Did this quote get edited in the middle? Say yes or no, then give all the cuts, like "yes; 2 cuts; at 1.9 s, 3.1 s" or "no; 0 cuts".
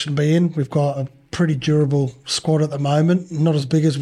yes; 1 cut; at 1.1 s